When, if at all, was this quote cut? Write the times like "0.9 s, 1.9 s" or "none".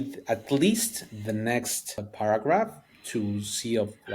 2.1 s